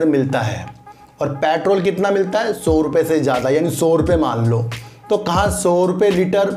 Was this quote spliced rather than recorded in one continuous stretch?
no; 0 cuts

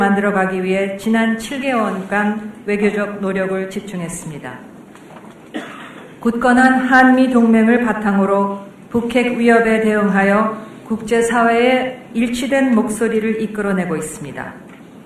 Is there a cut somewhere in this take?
no; 0 cuts

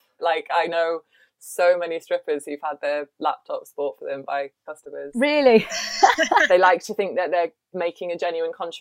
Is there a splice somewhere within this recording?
yes; 1 cut; at 6.5 s

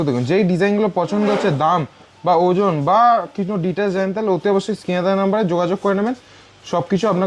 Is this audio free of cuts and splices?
yes; 0 cuts

